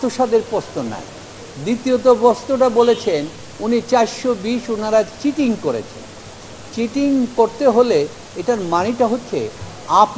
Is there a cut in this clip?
no; 0 cuts

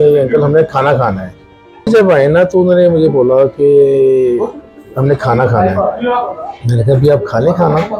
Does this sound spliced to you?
yes; 1 cut; at 1.9 s

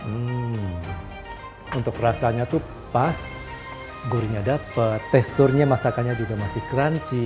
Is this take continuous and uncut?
no; 2 cuts; at 1.0 s, 5.0 s

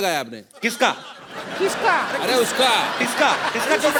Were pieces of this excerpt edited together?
no; 0 cuts

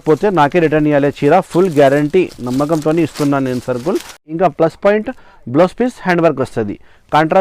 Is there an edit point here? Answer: yes; 1 cut; at 4.1 s

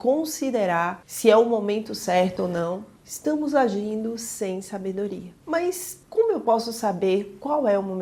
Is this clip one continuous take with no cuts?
yes; 0 cuts

